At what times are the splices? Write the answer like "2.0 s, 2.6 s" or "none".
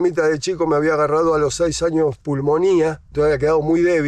none